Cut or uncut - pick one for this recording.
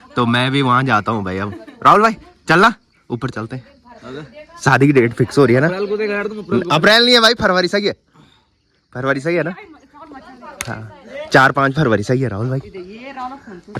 uncut